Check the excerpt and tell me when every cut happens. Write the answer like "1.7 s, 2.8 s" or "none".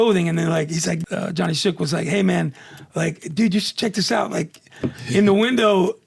1.0 s